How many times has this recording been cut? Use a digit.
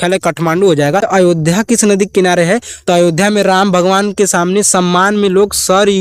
1